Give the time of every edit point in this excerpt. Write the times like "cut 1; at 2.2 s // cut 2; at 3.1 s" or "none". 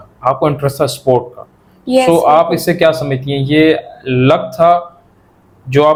none